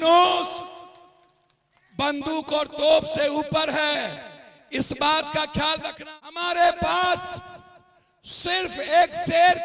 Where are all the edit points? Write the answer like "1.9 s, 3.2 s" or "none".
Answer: 6.0 s

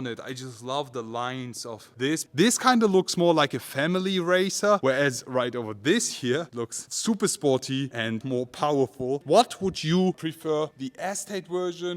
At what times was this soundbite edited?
2.3 s, 8.2 s, 9.2 s

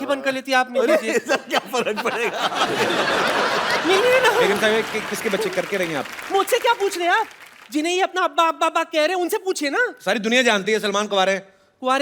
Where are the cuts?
none

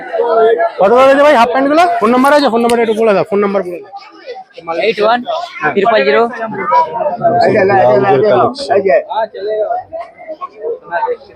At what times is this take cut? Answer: 2.0 s, 6.5 s

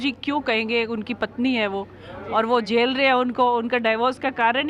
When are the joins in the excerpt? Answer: none

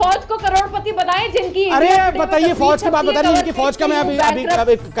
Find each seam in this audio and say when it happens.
none

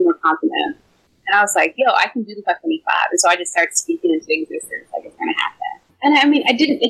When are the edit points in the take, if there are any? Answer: 5.9 s

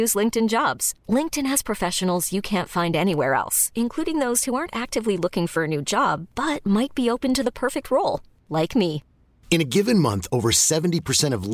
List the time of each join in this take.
none

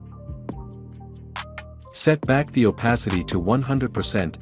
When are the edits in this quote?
1.9 s

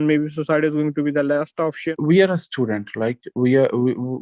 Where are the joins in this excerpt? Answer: none

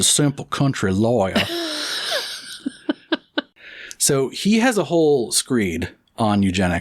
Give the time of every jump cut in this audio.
3.5 s

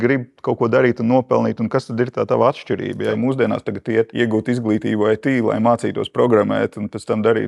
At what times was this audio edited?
3.1 s, 4.1 s

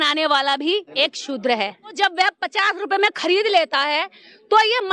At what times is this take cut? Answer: 0.9 s, 2.0 s

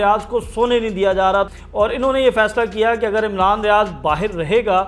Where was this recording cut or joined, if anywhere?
1.6 s

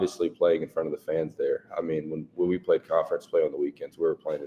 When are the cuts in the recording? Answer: none

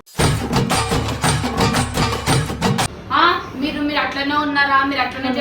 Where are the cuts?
2.9 s

